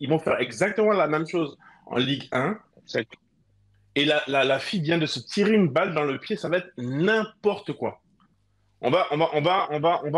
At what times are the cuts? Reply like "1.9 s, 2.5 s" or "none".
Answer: 3.1 s